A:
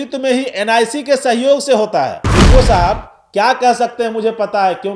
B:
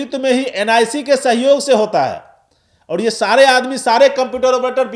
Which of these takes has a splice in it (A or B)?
A